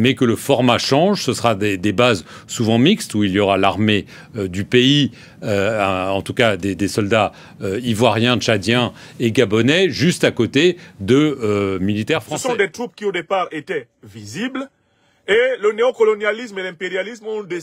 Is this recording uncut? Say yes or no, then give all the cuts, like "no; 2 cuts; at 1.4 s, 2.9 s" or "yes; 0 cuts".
no; 1 cut; at 12.3 s